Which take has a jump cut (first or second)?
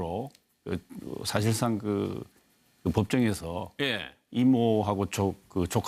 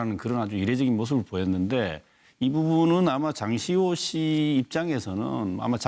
first